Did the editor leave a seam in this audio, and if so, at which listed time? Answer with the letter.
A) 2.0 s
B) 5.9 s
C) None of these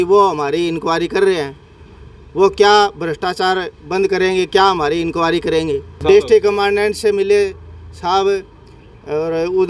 B